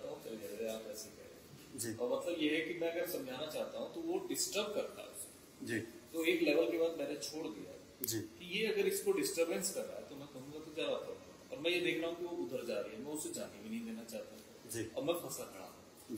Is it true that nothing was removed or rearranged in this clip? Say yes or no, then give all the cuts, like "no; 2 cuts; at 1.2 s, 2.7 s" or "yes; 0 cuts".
yes; 0 cuts